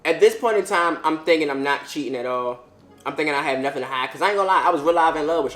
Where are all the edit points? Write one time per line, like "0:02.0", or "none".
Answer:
none